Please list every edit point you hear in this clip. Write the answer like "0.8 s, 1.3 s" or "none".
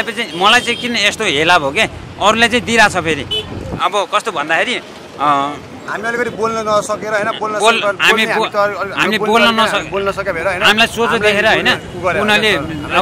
none